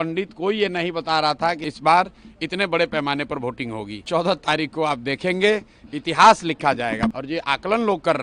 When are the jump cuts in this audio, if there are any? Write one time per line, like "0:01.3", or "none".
0:01.6
0:04.0
0:07.1